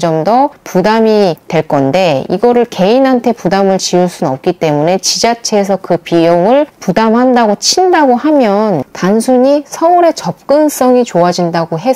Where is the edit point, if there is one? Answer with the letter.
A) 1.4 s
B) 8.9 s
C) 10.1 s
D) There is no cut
B